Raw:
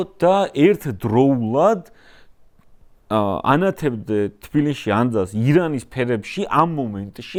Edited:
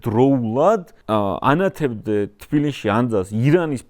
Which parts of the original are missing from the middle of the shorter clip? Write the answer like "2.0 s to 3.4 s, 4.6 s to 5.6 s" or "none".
1.9 s to 3.0 s